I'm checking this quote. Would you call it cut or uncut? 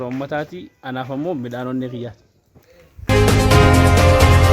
cut